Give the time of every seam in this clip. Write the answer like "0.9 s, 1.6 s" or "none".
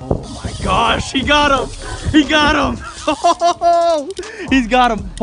none